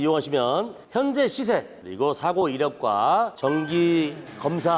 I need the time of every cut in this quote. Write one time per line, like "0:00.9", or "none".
0:01.8
0:03.3